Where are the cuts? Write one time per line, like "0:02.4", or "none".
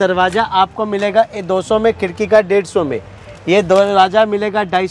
none